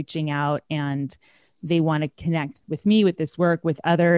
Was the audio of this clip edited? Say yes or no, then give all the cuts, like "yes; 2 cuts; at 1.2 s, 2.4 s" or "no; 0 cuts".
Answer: yes; 1 cut; at 2.6 s